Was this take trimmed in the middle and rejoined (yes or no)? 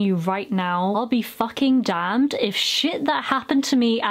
yes